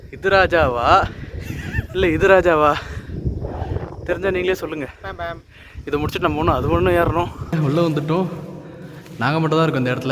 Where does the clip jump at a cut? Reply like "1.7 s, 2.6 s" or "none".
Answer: 7.5 s